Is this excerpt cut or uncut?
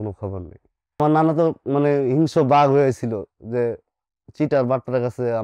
cut